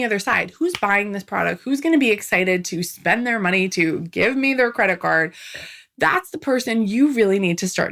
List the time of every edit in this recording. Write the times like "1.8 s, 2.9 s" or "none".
none

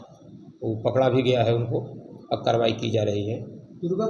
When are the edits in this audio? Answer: none

